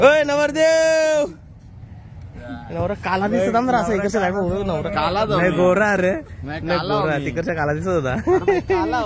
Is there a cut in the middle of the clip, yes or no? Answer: no